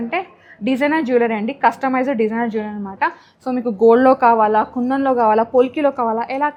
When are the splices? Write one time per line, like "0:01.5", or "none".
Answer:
none